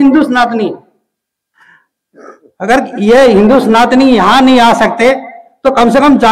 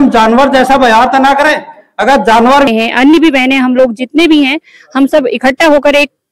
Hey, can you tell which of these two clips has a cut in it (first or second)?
second